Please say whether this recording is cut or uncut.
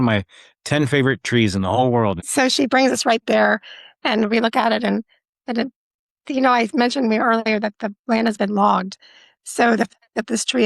cut